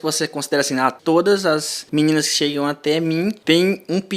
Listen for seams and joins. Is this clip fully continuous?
no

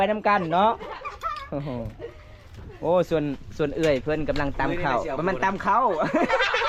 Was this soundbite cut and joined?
no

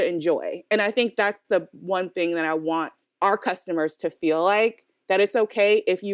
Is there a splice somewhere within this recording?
yes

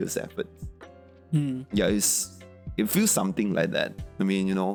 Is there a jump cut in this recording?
no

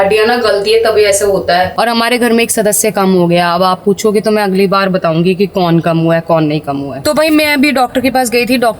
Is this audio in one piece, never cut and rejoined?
no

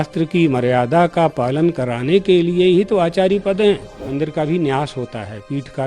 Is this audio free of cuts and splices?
no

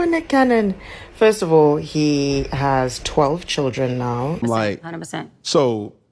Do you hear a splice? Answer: yes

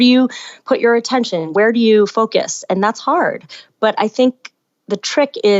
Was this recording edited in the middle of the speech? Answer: yes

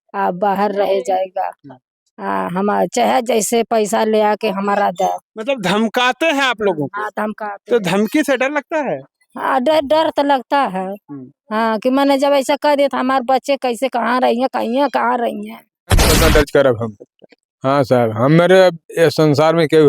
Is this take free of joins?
no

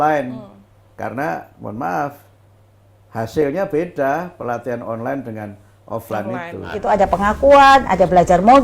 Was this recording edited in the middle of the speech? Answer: yes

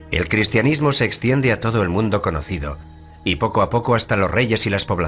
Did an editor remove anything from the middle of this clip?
no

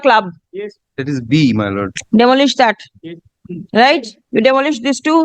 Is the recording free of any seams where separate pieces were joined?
no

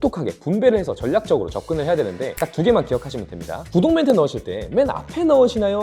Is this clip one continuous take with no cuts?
no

